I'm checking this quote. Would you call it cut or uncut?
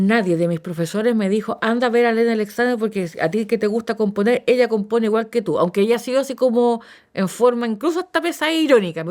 uncut